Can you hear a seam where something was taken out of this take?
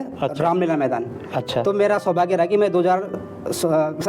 no; 0 cuts

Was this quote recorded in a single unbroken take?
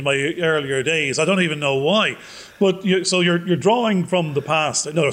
yes; 0 cuts

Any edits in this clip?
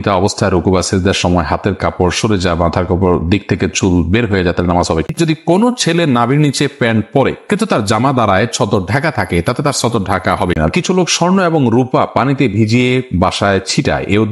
yes; 2 cuts; at 5.1 s, 10.7 s

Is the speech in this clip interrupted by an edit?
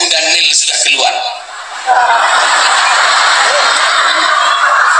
no; 0 cuts

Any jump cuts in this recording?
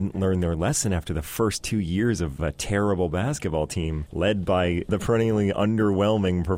yes; 3 cuts; at 2.4 s, 4.0 s, 4.9 s

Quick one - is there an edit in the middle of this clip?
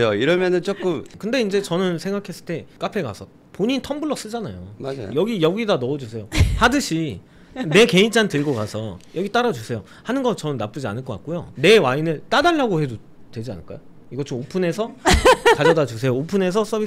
yes; 1 cut; at 11.4 s

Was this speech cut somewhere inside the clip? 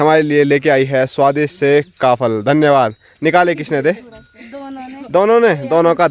no; 0 cuts

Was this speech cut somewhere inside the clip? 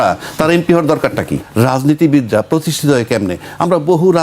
yes; 1 cut; at 1.4 s

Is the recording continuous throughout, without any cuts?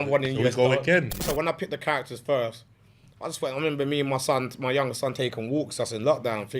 no; 1 cut; at 1.2 s

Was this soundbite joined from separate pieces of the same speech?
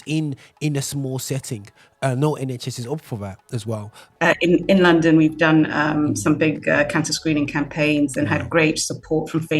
yes; 1 cut; at 3.9 s

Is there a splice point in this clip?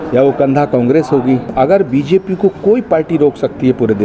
yes; 1 cut; at 1.5 s

